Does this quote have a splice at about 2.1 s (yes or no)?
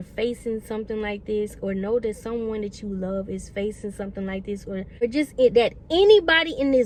no